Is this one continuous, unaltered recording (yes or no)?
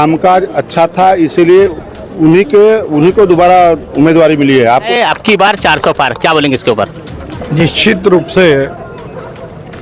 no